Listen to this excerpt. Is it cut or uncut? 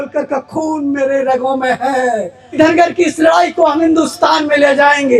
cut